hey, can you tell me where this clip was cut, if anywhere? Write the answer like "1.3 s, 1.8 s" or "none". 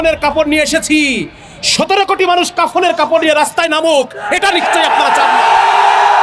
none